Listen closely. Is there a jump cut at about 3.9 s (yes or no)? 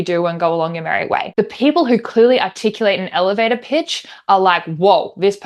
no